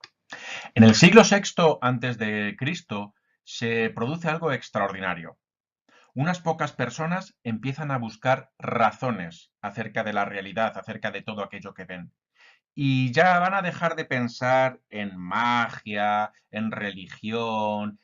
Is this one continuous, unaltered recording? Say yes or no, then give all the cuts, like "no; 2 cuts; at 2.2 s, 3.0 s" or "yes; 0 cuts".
no; 1 cut; at 9.5 s